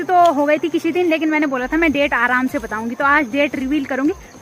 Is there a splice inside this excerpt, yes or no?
no